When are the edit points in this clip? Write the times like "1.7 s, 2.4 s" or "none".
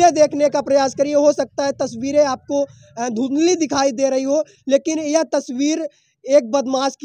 none